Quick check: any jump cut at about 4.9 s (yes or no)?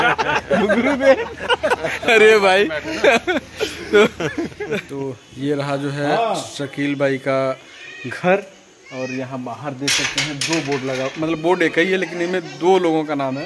yes